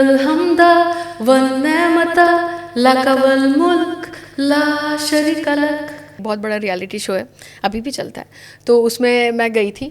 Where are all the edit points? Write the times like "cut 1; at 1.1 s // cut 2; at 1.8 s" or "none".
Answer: cut 1; at 6.2 s